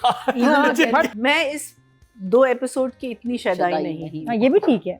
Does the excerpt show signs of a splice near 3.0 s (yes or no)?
no